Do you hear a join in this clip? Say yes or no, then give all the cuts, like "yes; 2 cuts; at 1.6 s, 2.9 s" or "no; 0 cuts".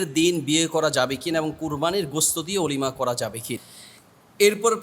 yes; 1 cut; at 3.6 s